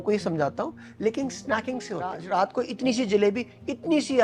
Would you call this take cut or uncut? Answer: cut